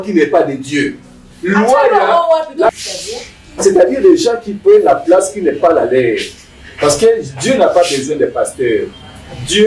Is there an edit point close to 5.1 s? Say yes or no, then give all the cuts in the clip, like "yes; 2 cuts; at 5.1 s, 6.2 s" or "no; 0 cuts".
no; 1 cut; at 2.8 s